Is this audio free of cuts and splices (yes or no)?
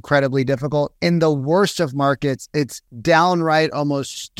no